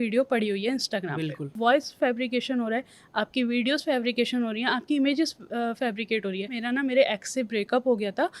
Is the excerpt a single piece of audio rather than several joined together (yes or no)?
no